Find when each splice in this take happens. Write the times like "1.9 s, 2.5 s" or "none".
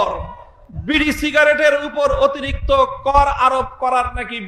none